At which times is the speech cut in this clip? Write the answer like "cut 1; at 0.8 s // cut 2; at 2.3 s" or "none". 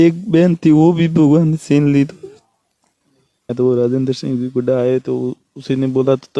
cut 1; at 3.5 s